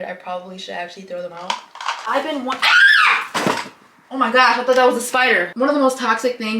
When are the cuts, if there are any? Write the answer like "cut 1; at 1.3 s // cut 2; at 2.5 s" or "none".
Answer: cut 1; at 2.0 s // cut 2; at 5.5 s